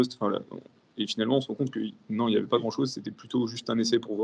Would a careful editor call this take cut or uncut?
uncut